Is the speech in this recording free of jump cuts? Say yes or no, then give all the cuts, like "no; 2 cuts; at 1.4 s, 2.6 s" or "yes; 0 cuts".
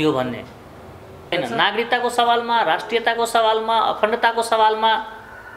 no; 1 cut; at 1.3 s